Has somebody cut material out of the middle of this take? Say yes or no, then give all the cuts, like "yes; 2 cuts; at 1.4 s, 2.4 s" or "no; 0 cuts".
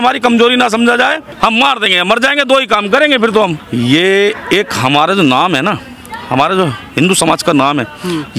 yes; 2 cuts; at 1.3 s, 3.6 s